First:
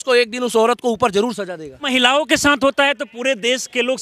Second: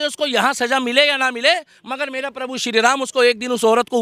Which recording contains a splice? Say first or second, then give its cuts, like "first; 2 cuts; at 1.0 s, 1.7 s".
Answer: first; 1 cut; at 1.9 s